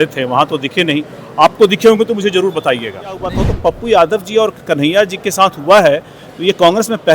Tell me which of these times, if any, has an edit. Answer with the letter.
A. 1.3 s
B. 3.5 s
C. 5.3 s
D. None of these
B